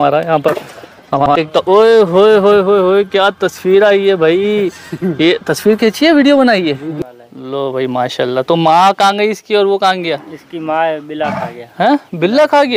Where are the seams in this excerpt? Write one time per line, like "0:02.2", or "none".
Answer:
0:01.3
0:06.9